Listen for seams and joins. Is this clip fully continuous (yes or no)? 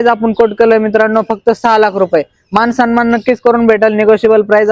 yes